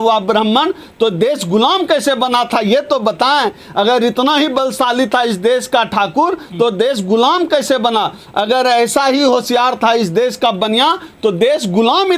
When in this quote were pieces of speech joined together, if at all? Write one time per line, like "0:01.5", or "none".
none